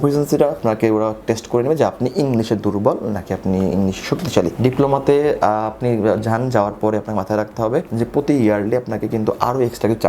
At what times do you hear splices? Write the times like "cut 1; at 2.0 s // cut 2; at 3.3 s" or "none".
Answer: cut 1; at 4.5 s

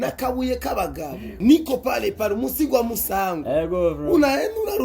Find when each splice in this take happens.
cut 1; at 1.4 s

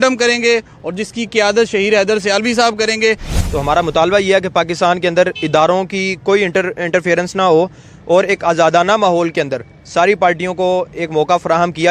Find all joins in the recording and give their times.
cut 1; at 3.4 s

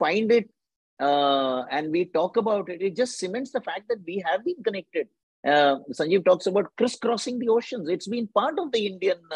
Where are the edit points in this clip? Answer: none

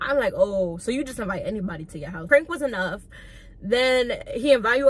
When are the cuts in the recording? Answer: cut 1; at 2.3 s

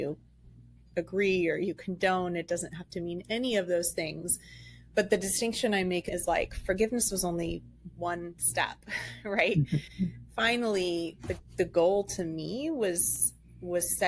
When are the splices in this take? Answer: cut 1; at 6.1 s

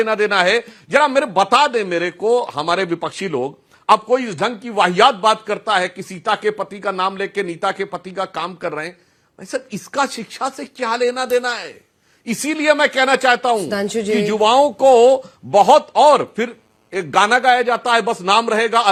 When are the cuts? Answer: none

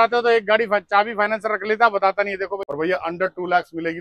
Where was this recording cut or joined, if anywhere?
cut 1; at 2.6 s

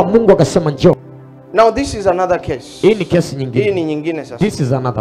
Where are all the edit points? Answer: cut 1; at 1.0 s

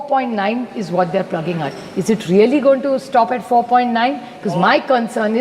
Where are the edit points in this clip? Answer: none

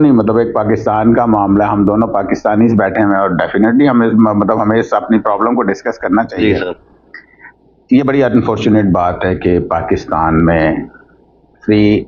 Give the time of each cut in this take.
none

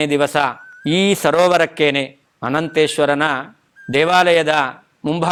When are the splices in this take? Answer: none

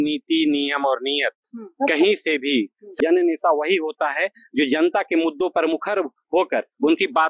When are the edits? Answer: cut 1; at 2.9 s

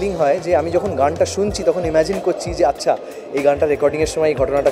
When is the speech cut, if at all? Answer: none

